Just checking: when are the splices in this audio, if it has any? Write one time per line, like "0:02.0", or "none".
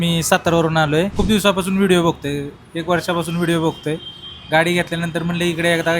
0:01.1